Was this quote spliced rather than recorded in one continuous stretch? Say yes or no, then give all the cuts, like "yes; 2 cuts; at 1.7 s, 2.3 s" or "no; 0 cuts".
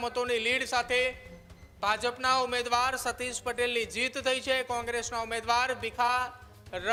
no; 0 cuts